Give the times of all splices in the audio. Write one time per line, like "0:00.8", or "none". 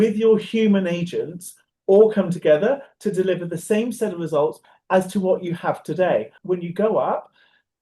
0:04.7
0:06.3